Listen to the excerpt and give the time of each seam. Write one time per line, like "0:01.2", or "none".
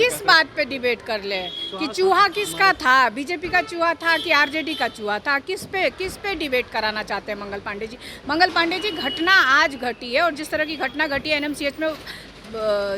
none